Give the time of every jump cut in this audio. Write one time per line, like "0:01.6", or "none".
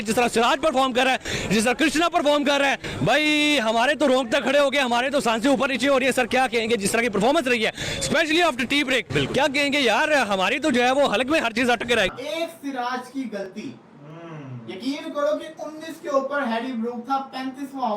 0:12.2